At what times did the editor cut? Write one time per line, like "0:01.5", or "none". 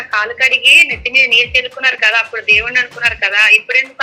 none